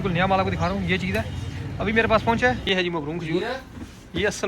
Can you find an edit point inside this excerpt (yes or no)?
yes